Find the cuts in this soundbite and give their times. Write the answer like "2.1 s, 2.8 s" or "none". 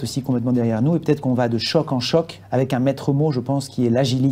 2.4 s

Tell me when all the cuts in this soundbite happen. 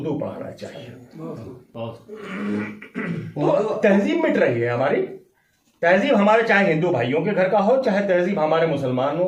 none

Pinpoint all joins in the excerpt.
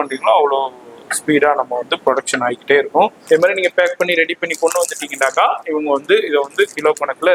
3.2 s

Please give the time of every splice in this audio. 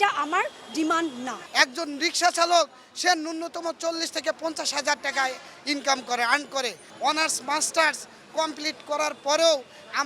1.4 s, 6.9 s

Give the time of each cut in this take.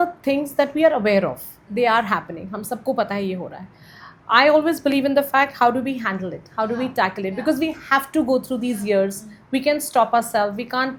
none

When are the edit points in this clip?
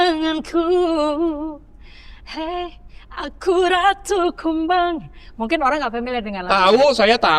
none

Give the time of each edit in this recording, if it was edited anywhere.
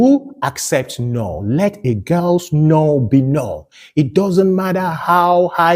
none

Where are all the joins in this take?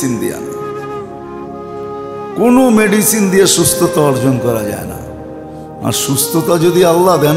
none

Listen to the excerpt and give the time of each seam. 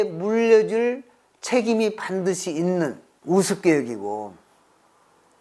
3.1 s

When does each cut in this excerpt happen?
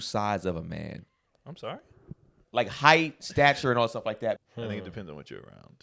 2.4 s, 4.4 s

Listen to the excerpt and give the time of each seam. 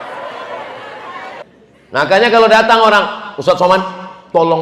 1.4 s

